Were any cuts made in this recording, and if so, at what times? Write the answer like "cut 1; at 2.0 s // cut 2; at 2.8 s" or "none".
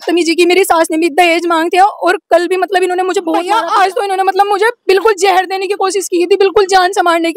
cut 1; at 3.5 s

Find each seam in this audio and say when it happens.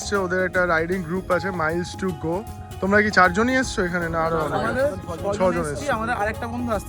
none

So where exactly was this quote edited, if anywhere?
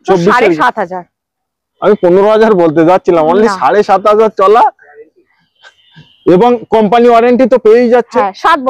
none

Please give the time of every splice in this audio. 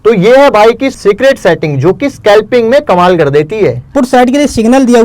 cut 1; at 1.0 s // cut 2; at 3.9 s

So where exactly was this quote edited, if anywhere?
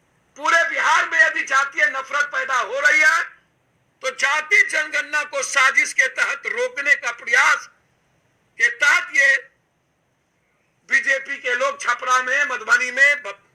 cut 1; at 1.0 s

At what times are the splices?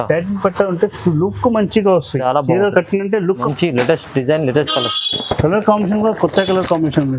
cut 1; at 3.5 s

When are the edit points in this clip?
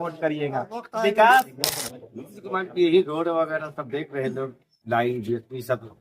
cut 1; at 1.6 s

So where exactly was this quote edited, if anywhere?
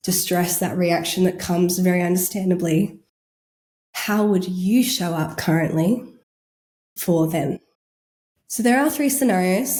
none

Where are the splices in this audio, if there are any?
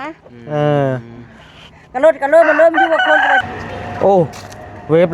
cut 1; at 3.4 s

